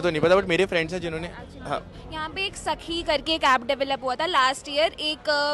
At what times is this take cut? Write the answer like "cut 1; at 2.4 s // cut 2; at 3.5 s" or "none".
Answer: none